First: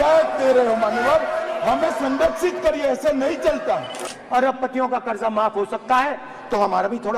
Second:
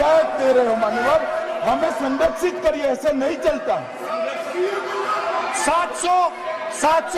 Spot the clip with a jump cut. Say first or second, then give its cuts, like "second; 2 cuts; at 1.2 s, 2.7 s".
first; 1 cut; at 4.0 s